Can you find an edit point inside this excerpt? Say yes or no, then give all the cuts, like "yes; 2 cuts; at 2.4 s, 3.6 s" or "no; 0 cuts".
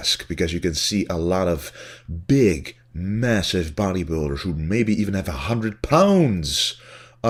no; 0 cuts